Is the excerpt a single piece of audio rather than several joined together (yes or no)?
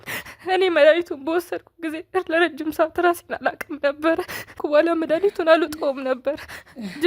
no